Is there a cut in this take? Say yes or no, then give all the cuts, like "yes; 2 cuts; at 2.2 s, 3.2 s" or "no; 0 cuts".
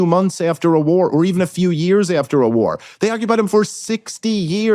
no; 0 cuts